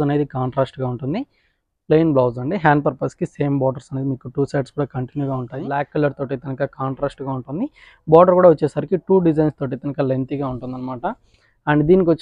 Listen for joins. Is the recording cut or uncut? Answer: cut